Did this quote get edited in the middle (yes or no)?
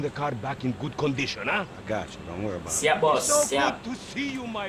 no